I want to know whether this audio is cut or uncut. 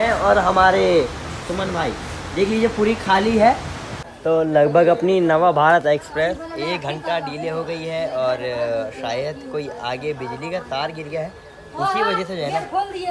cut